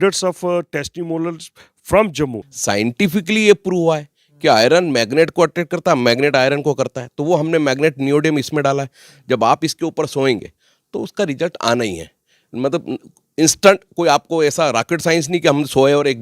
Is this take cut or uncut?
cut